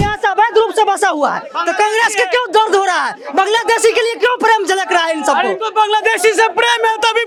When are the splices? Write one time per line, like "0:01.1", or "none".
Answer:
none